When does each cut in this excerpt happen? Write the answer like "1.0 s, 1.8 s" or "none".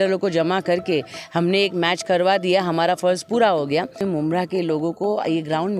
4.0 s